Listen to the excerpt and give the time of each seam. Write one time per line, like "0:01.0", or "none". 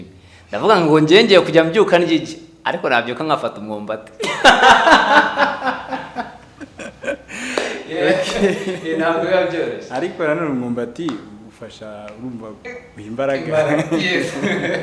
none